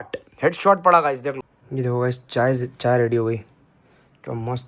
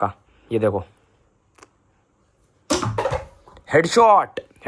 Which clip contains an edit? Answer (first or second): first